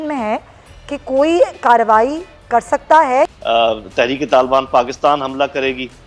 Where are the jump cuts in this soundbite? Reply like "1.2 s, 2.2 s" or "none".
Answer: 3.3 s